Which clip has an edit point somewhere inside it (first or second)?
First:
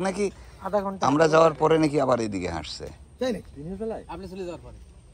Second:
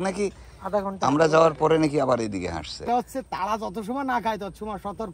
second